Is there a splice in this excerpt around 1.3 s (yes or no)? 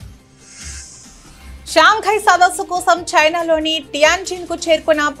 yes